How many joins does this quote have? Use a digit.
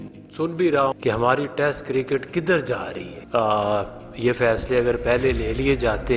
2